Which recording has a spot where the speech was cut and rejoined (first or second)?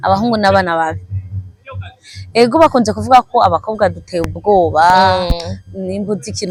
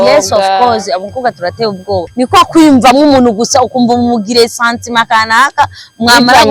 second